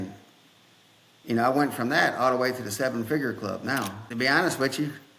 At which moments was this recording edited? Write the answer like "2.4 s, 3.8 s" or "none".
4.0 s

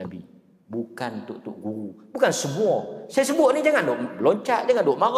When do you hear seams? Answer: none

